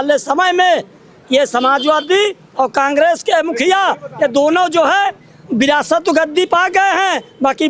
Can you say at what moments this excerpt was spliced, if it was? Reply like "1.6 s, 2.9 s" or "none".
none